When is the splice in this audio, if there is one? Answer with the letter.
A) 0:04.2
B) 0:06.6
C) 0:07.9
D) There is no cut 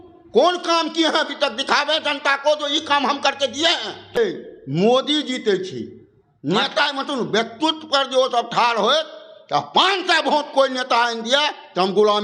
A